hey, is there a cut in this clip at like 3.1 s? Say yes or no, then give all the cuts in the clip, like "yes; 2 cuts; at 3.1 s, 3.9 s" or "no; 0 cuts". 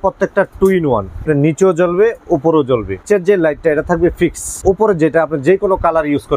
yes; 3 cuts; at 1.2 s, 3.1 s, 4.6 s